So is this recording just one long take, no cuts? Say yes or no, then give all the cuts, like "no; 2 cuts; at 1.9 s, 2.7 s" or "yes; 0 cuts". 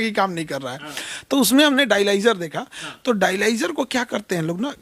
yes; 0 cuts